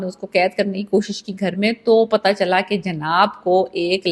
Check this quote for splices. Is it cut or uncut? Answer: uncut